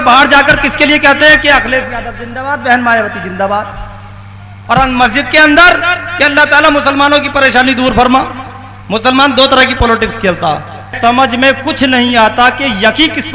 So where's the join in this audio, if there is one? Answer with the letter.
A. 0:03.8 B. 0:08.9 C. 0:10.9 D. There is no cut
C